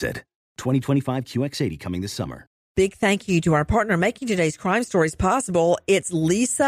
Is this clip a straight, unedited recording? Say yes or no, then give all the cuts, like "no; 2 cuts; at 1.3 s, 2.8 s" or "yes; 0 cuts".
no; 1 cut; at 2.6 s